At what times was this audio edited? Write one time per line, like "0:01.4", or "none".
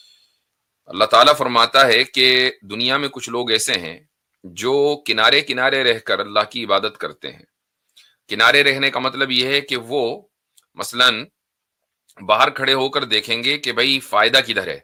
none